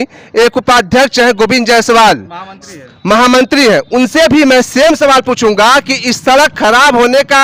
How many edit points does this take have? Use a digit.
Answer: 0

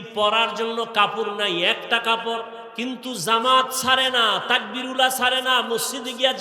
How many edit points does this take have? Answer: 1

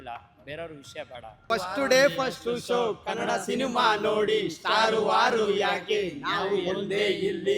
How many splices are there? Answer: 1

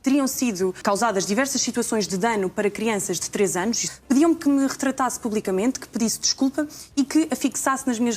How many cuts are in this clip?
1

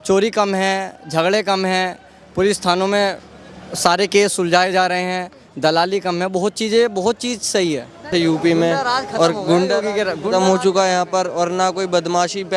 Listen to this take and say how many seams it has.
1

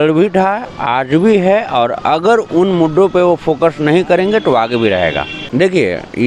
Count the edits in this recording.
1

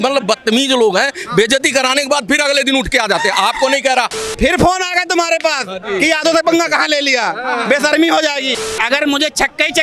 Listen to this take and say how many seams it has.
2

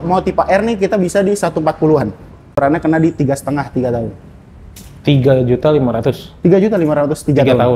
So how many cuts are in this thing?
1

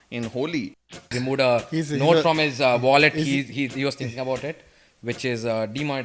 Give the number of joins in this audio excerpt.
1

